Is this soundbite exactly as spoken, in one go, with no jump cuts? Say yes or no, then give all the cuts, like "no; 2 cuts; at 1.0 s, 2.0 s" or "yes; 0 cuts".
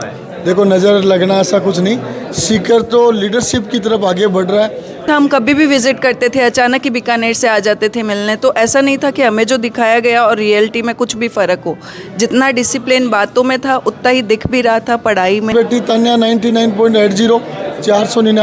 no; 2 cuts; at 5.0 s, 15.5 s